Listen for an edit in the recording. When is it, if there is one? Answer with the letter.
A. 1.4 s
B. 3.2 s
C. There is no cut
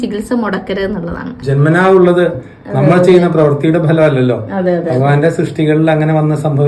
A